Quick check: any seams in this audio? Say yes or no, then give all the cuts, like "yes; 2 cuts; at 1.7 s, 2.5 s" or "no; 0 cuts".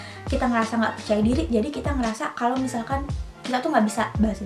no; 0 cuts